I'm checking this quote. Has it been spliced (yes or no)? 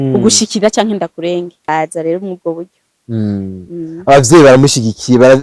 yes